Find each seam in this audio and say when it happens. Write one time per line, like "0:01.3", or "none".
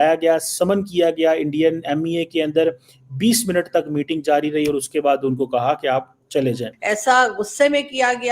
0:06.7